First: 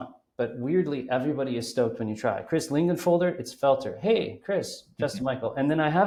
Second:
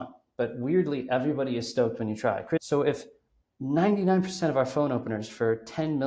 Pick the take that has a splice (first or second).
second